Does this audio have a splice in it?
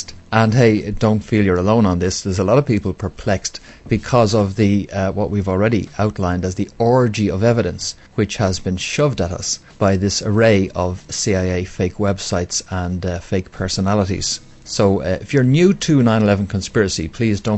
yes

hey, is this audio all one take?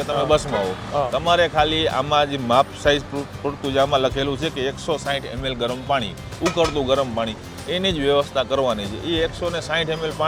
yes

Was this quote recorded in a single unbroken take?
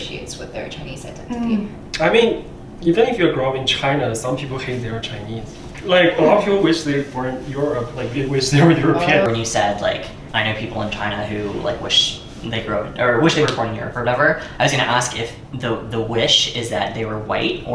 yes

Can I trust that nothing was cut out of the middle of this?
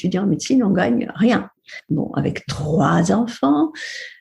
no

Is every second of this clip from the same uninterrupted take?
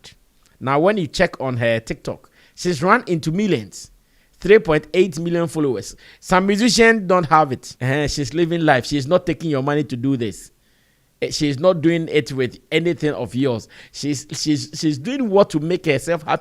no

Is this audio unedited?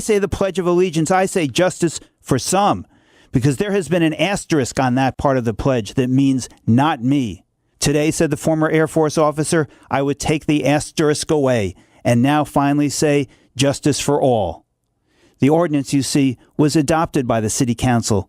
yes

